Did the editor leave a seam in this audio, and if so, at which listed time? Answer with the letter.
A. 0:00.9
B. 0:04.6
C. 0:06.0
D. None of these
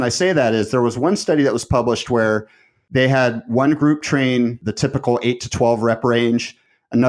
B